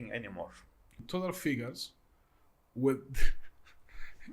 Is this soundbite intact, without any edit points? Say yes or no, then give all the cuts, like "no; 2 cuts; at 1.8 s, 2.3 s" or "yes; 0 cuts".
no; 1 cut; at 1.0 s